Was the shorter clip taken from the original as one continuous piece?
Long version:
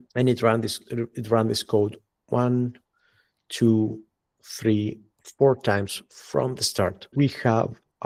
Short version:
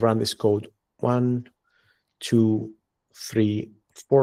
yes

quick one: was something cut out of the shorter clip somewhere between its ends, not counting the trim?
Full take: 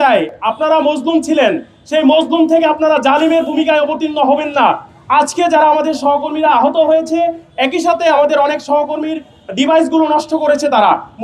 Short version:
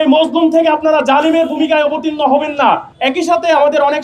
yes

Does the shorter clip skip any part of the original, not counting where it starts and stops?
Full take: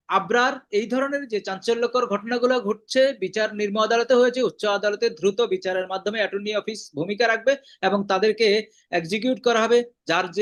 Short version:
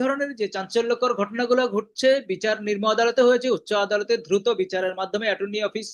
no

